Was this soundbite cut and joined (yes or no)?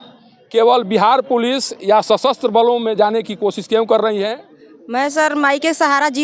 yes